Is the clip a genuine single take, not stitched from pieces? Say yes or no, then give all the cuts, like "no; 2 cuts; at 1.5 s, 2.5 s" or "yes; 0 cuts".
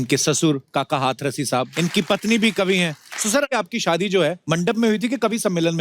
no; 3 cuts; at 1.7 s, 3.5 s, 4.4 s